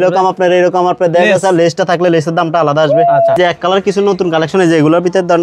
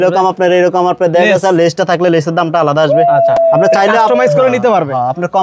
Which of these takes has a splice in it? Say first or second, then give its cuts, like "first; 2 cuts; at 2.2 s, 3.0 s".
first; 1 cut; at 3.4 s